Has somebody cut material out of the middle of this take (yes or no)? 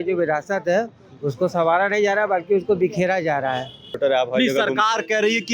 yes